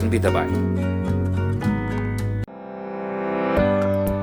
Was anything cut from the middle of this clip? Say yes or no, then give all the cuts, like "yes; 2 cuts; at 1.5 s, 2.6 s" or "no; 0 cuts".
no; 0 cuts